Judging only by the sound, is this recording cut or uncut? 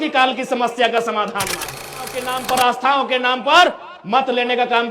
cut